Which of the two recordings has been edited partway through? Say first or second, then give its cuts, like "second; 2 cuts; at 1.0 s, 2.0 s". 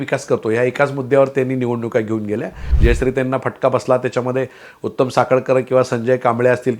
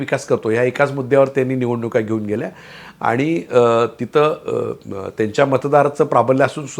first; 1 cut; at 2.7 s